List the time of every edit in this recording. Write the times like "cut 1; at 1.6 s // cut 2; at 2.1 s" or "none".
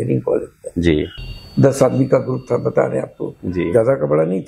cut 1; at 1.1 s

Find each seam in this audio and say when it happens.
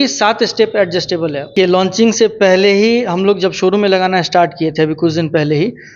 cut 1; at 1.5 s

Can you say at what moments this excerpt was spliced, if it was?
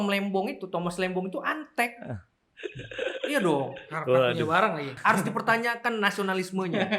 cut 1; at 4.9 s

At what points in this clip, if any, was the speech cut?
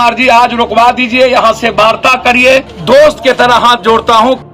cut 1; at 2.7 s

